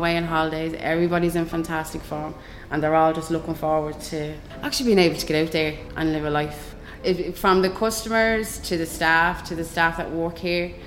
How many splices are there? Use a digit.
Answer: 0